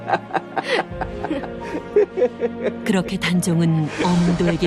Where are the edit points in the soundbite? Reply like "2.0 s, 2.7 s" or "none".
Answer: none